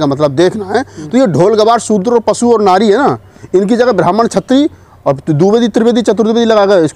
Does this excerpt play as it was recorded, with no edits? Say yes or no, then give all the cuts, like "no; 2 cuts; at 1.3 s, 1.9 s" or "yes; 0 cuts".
yes; 0 cuts